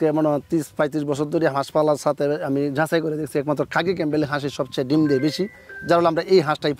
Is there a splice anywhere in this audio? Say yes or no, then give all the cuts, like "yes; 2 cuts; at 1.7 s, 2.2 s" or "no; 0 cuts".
no; 0 cuts